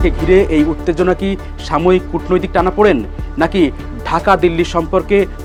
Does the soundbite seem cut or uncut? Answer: uncut